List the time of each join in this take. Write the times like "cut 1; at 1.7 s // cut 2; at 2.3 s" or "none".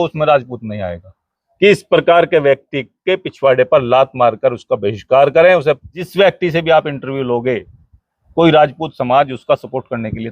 cut 1; at 1.7 s // cut 2; at 6.0 s